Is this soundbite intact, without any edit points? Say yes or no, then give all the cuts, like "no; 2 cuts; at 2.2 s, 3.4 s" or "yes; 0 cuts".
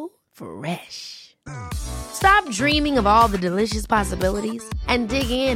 yes; 0 cuts